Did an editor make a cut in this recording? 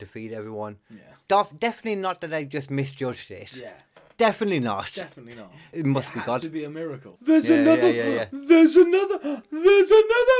yes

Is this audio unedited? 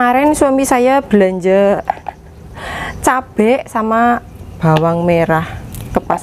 yes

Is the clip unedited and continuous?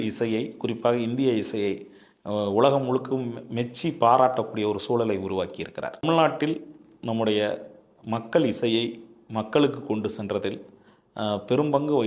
no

